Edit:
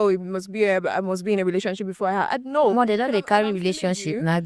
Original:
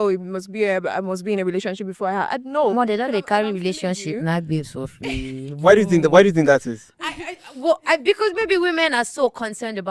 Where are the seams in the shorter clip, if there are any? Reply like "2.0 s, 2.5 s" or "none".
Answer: none